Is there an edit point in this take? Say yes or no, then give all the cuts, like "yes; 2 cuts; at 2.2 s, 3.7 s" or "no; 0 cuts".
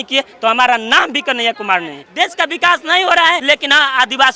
yes; 2 cuts; at 2.0 s, 3.4 s